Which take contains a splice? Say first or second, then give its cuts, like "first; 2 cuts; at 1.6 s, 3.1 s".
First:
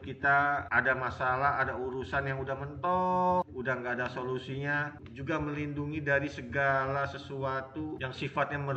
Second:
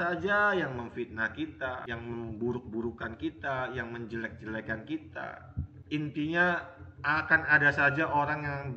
first; 1 cut; at 5.0 s